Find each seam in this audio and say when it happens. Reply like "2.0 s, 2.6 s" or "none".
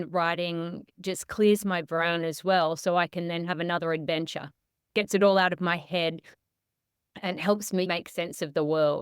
7.9 s

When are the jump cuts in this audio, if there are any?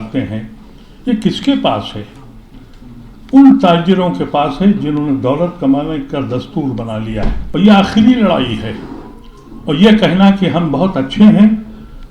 7.4 s

